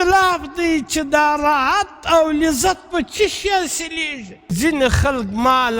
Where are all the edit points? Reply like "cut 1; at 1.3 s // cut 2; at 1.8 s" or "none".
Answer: cut 1; at 4.5 s

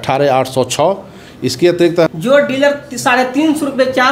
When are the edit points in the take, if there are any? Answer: cut 1; at 2.1 s

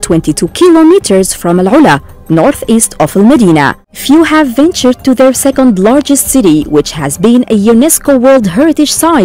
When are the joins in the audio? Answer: cut 1; at 3.9 s

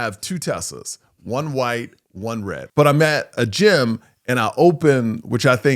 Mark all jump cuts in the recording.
cut 1; at 2.6 s

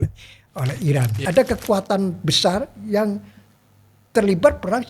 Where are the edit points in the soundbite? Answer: cut 1; at 1.2 s

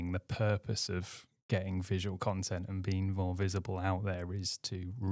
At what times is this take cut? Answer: none

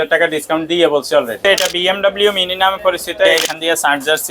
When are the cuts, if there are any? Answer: cut 1; at 1.4 s // cut 2; at 3.4 s

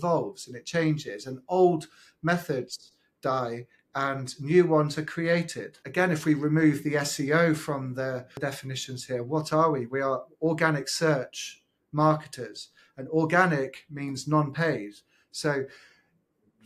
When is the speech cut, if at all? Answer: none

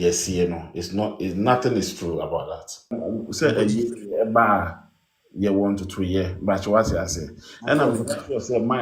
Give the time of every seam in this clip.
cut 1; at 3.0 s

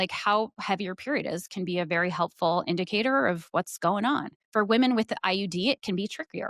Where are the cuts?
cut 1; at 4.4 s

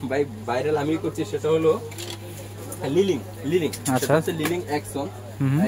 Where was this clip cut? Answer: none

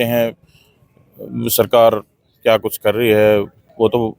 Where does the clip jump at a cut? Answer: none

